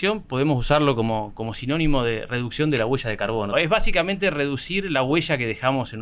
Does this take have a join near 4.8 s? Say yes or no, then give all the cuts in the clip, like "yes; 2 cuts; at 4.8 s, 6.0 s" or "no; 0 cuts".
no; 1 cut; at 3.5 s